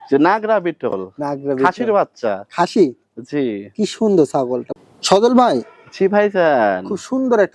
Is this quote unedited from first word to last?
no; 1 cut; at 4.7 s

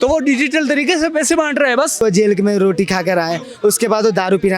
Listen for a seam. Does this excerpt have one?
yes; 1 cut; at 2.0 s

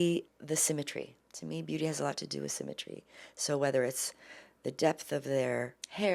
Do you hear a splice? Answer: no; 0 cuts

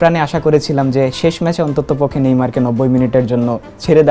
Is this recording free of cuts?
yes; 0 cuts

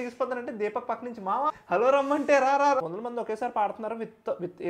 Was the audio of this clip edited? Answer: yes; 1 cut; at 2.8 s

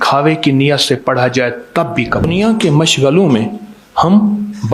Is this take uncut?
no; 1 cut; at 2.2 s

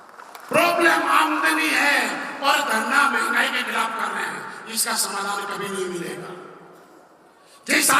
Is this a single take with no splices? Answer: yes; 0 cuts

